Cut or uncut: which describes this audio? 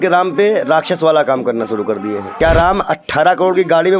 cut